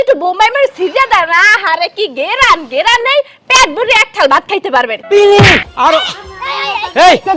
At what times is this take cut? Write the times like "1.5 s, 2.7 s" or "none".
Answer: 5.0 s